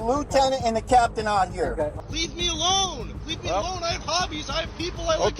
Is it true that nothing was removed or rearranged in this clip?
no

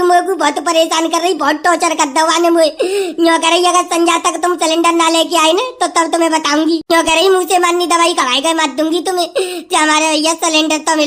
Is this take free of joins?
no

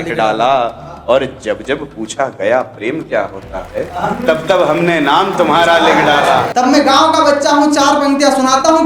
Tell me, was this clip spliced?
yes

